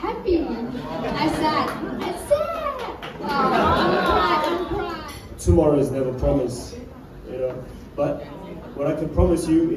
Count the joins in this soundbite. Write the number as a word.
one